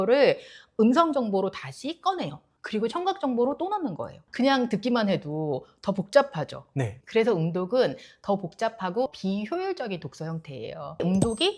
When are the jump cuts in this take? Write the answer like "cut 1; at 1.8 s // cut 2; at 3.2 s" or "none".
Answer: none